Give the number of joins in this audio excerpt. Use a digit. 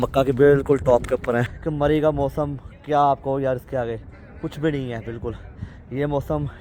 1